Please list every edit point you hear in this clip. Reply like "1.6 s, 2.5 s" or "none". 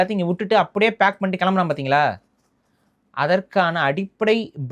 none